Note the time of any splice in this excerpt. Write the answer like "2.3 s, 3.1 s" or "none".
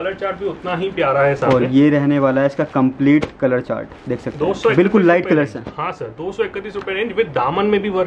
none